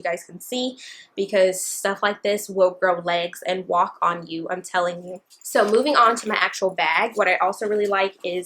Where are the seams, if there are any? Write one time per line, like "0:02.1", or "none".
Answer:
none